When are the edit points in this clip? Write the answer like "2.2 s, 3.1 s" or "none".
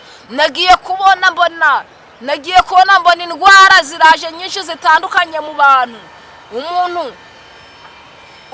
none